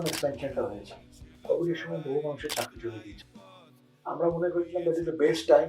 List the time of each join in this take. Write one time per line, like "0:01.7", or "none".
0:01.3

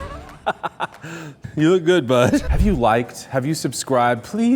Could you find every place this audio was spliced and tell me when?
0:01.4
0:02.5

